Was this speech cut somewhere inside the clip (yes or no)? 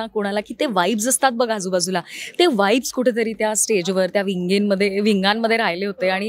no